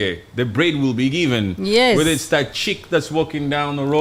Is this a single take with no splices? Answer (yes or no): yes